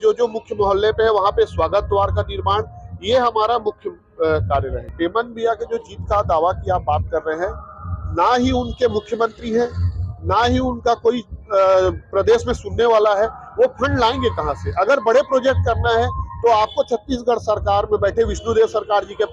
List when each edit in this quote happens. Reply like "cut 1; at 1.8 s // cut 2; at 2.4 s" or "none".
cut 1; at 4.9 s